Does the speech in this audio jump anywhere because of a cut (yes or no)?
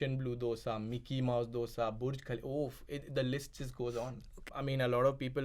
yes